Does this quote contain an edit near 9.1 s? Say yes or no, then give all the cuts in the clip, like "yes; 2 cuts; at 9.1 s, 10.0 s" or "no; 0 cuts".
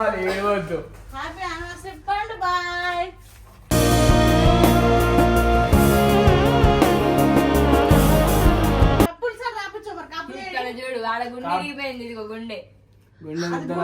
yes; 1 cut; at 9.1 s